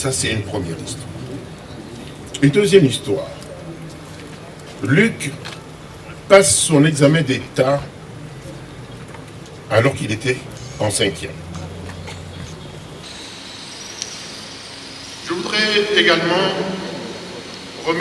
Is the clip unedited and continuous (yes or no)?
no